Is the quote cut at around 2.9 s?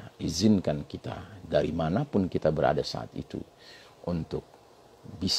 no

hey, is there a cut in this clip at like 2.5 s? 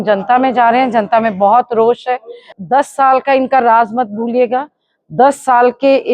yes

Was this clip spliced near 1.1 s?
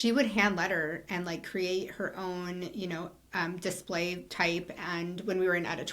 no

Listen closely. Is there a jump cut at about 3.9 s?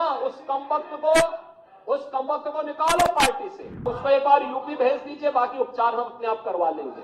yes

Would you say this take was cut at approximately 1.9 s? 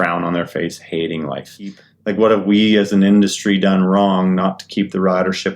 yes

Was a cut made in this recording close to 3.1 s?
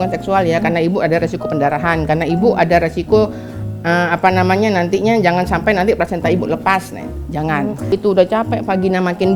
no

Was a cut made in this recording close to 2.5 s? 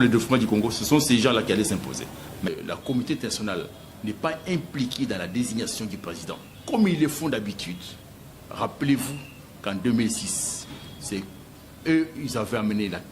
yes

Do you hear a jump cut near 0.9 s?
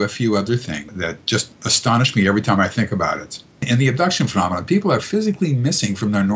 yes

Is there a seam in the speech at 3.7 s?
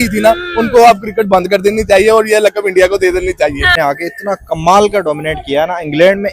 yes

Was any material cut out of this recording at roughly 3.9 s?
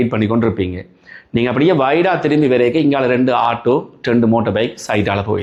no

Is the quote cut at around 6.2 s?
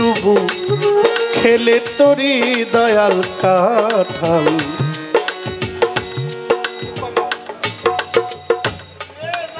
no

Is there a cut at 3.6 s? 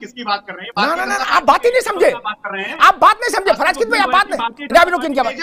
no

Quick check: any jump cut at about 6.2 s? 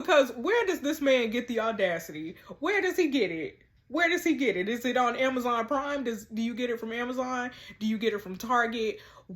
no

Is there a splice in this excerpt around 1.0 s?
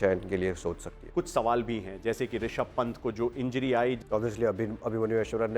yes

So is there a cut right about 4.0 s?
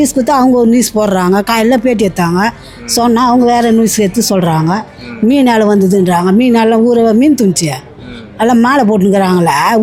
no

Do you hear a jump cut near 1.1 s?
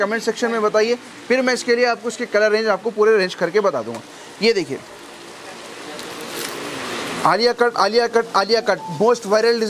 no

